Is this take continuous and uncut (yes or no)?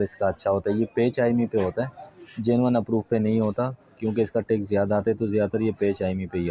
yes